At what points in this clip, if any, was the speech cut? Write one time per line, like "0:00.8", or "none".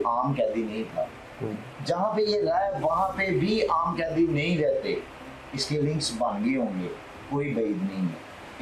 none